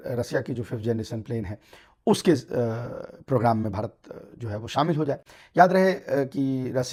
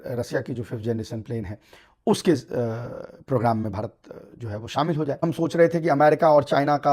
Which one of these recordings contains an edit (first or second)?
second